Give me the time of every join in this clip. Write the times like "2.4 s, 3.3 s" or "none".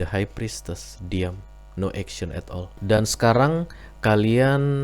2.7 s